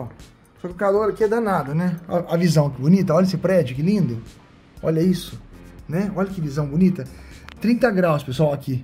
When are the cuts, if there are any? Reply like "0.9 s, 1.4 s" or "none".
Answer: none